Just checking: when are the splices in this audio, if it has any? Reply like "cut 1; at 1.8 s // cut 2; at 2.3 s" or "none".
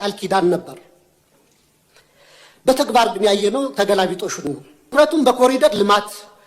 cut 1; at 4.9 s